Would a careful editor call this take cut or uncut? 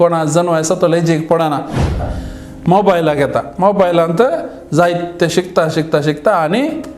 cut